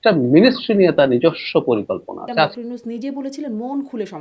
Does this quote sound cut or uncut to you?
cut